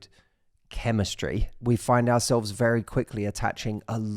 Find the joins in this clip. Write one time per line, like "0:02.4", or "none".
0:01.5